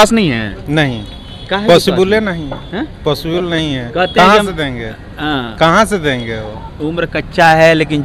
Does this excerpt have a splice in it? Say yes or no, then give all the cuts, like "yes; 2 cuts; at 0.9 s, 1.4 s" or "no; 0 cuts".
no; 0 cuts